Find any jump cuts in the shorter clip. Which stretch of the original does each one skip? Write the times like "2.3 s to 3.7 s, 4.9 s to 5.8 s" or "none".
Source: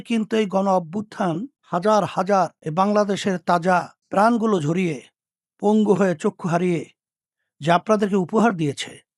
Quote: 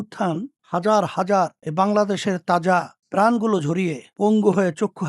5.0 s to 5.5 s